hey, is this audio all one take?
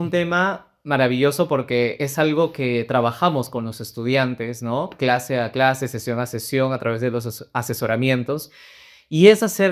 yes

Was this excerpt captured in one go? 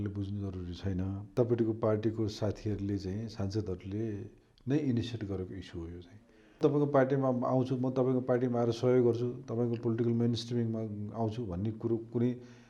no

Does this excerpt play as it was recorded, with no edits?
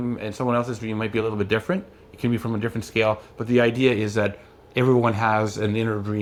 yes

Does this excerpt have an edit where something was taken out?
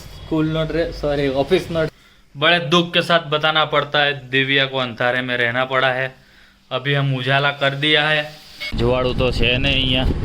yes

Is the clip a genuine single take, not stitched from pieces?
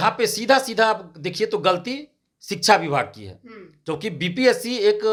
yes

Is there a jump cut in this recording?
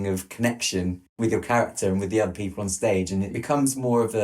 yes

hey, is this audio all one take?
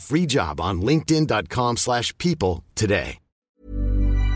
no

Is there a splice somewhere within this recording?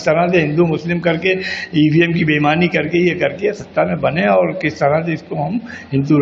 no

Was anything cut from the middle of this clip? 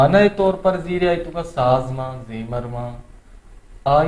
no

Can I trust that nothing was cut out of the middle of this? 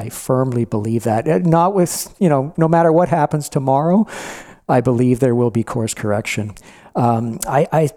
yes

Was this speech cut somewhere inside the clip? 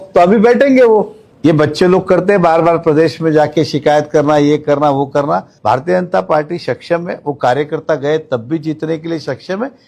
yes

